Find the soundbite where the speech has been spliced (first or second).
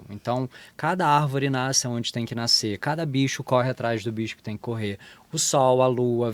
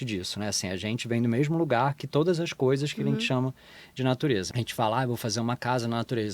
second